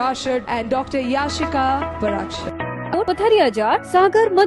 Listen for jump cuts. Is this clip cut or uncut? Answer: cut